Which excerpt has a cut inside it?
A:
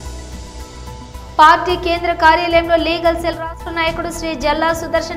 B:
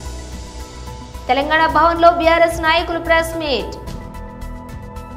A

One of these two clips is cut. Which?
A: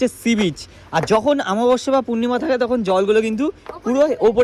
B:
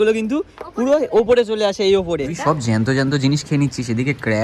B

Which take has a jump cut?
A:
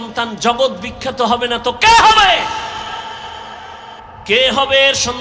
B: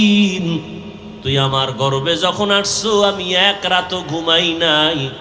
A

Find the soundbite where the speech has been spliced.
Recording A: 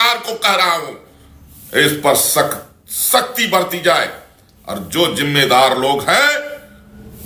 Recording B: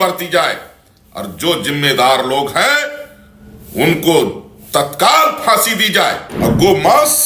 B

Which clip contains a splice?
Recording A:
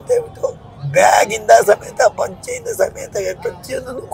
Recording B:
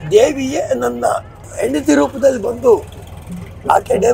B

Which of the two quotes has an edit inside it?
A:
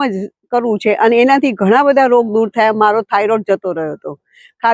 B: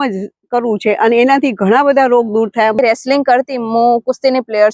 B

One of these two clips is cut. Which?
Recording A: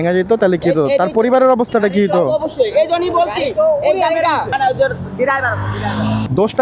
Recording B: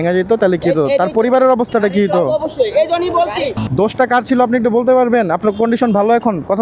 B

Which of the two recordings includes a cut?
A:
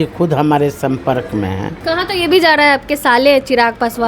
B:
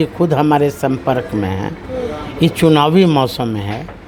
A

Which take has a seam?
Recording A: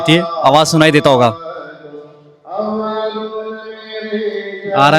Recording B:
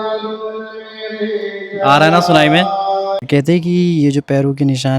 B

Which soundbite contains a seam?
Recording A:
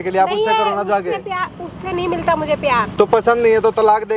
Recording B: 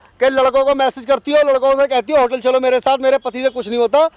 A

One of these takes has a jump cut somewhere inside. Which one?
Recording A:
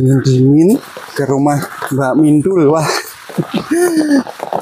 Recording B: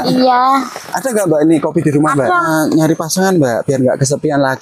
B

